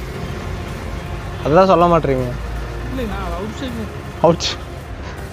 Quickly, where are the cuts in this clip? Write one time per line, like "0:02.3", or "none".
none